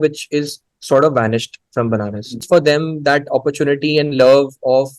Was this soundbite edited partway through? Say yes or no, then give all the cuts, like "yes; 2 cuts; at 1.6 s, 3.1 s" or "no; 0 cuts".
yes; 1 cut; at 2.4 s